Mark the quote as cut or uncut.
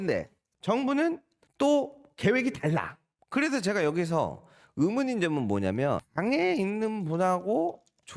cut